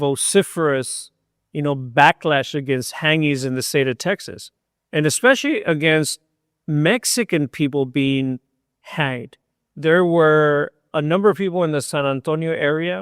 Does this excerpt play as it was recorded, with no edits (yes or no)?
yes